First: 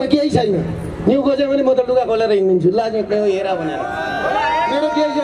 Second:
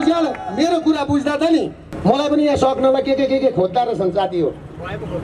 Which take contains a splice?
second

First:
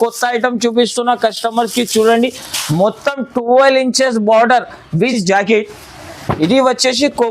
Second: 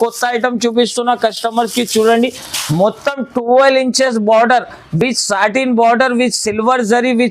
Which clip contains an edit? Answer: first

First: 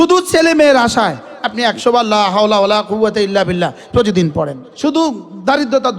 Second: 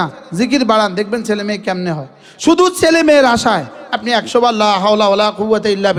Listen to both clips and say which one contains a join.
first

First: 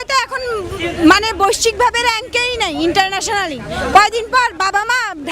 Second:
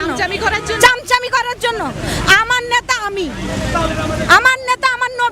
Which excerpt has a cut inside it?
second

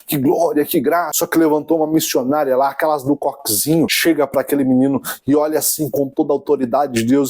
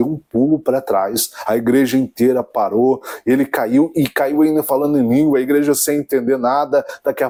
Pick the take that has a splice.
first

